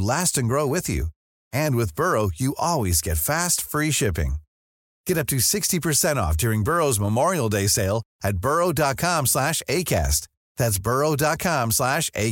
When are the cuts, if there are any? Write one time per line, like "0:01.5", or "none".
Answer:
none

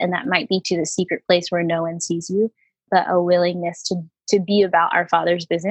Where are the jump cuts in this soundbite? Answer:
none

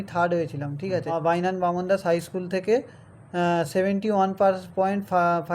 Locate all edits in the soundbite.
0:01.1

